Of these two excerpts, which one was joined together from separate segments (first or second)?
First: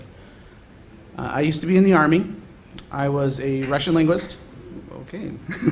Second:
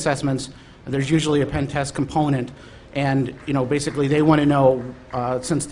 first